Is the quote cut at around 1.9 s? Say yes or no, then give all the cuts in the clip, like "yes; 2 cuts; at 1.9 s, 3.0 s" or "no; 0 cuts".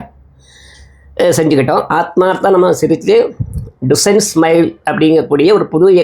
yes; 1 cut; at 1.9 s